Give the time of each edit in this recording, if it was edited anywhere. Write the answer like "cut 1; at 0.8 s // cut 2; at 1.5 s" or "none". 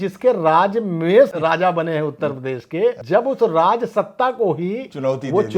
cut 1; at 1.3 s // cut 2; at 3.0 s